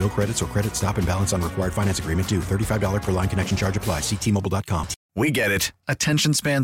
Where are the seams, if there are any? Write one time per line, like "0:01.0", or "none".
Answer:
0:05.0